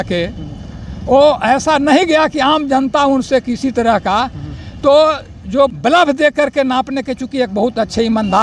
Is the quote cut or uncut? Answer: cut